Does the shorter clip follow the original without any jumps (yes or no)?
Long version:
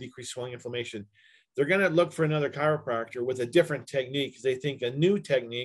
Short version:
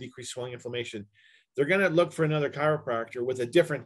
yes